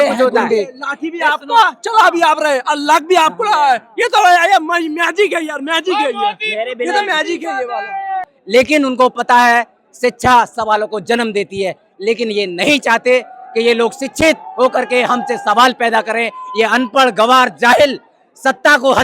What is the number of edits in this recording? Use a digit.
1